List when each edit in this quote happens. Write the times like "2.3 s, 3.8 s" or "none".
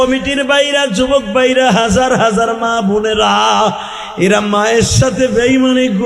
none